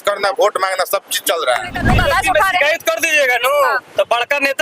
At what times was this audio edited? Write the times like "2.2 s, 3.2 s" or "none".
1.8 s